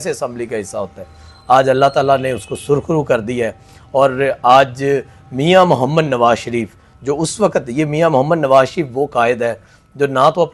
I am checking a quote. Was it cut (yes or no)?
no